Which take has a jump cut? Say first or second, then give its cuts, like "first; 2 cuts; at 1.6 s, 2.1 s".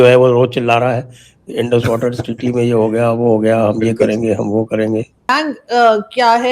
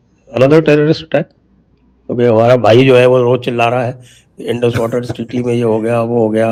first; 1 cut; at 5.1 s